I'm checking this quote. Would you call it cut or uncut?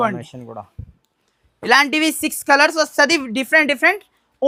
uncut